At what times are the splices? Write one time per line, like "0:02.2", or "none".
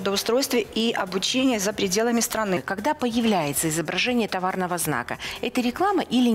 0:02.6